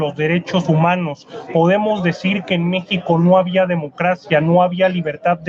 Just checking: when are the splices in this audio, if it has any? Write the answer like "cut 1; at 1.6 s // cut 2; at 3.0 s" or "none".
none